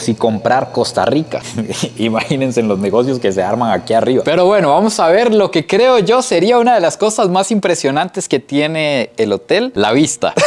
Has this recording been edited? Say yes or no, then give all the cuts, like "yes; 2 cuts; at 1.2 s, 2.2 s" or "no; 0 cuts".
yes; 1 cut; at 4.2 s